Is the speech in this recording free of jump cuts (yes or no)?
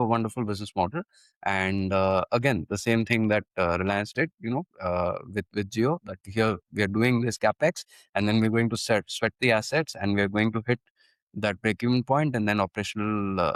yes